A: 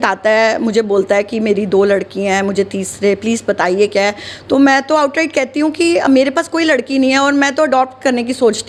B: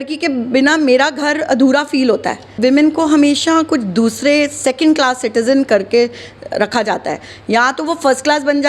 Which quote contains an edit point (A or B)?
B